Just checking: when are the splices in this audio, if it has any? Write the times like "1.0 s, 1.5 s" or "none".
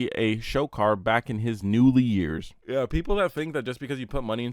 2.5 s